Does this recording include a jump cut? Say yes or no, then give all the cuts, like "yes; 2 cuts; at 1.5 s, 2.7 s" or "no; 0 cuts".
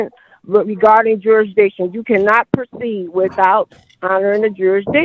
no; 0 cuts